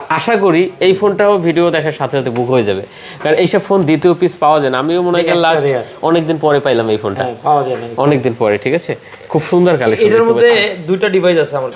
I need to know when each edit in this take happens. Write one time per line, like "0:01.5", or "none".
none